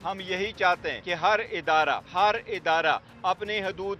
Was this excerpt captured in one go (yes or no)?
no